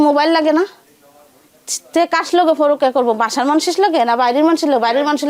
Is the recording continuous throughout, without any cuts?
yes; 0 cuts

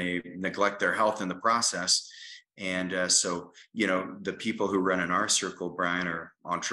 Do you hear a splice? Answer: no; 0 cuts

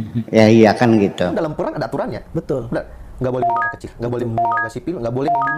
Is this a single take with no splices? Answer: no; 1 cut; at 1.4 s

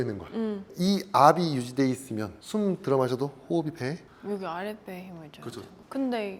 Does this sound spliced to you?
no; 0 cuts

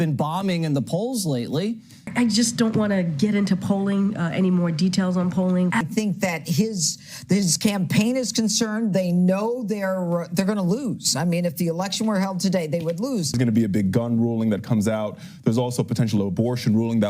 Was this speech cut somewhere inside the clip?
yes; 3 cuts; at 2.0 s, 5.8 s, 13.4 s

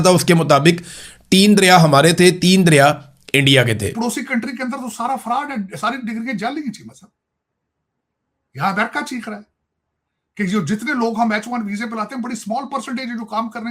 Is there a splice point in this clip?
yes; 1 cut; at 3.9 s

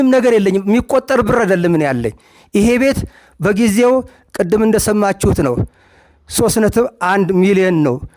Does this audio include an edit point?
no; 0 cuts

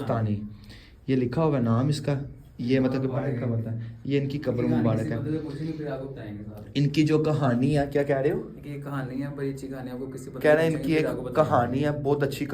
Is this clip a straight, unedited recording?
yes; 0 cuts

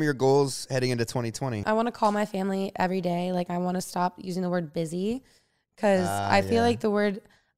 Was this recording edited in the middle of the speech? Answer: yes; 1 cut; at 1.6 s

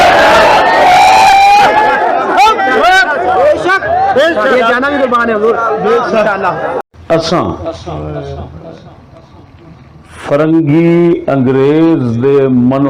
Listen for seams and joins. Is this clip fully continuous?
no; 1 cut; at 6.9 s

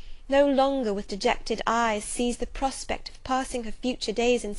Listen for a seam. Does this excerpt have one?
no; 0 cuts

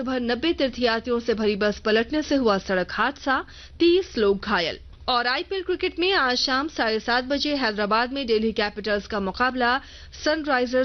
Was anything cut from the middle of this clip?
yes; 1 cut; at 4.9 s

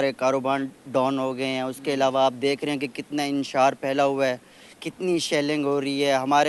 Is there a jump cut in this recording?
no; 0 cuts

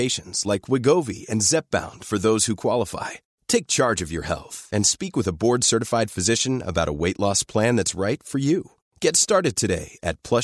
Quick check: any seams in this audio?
no; 0 cuts

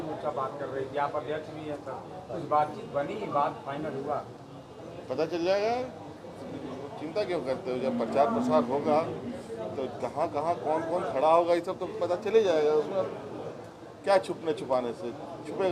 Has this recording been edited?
no; 0 cuts

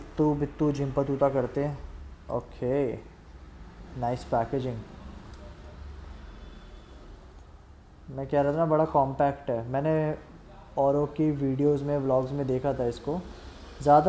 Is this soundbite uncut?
yes; 0 cuts

